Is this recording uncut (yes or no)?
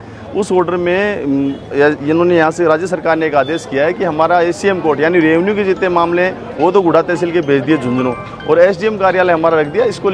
yes